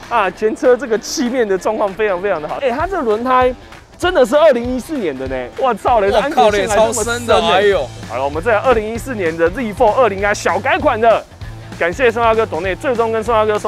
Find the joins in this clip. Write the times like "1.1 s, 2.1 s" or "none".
2.6 s, 8.0 s, 11.6 s